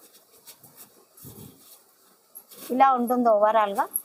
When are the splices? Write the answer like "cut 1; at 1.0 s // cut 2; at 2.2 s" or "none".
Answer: none